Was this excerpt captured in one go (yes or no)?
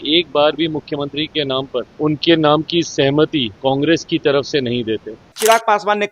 no